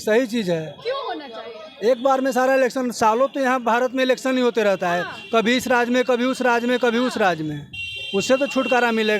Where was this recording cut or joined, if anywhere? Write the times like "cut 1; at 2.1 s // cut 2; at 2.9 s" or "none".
none